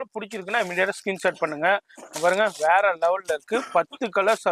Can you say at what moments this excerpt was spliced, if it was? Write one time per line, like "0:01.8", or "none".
none